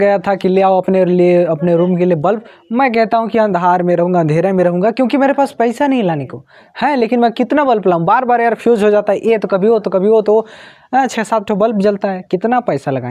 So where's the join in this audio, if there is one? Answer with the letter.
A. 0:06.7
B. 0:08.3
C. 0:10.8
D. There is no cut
D